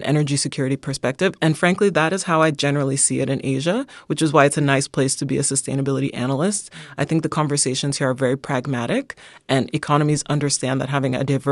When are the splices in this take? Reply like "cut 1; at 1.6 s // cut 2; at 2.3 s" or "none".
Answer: none